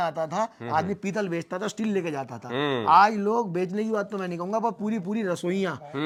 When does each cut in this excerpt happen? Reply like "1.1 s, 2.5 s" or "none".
none